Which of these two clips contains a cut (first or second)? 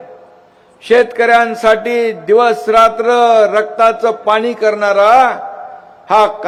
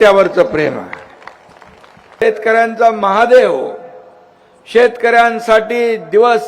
second